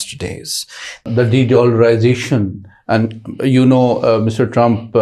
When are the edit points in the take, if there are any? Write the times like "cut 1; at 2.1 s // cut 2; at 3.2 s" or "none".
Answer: cut 1; at 1.0 s

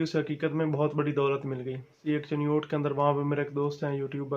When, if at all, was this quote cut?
cut 1; at 2.0 s

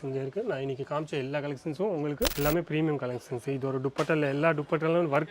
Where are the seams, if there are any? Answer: cut 1; at 2.3 s

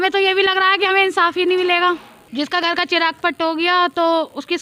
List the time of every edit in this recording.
cut 1; at 2.2 s

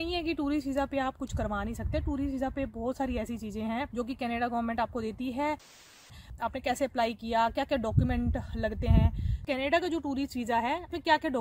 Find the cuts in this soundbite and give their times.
cut 1; at 3.9 s // cut 2; at 5.8 s // cut 3; at 9.4 s

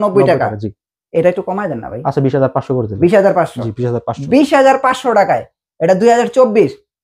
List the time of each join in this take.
none

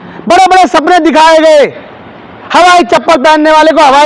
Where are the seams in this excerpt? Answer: none

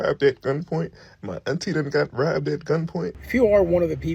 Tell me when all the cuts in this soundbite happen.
cut 1; at 3.2 s

